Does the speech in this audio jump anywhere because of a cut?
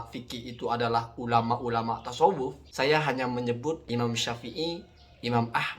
yes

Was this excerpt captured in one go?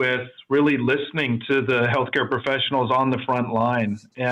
yes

